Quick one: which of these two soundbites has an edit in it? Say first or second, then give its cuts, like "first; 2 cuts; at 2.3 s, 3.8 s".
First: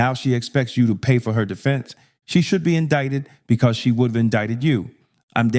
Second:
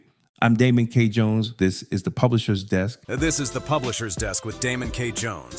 second; 1 cut; at 3.0 s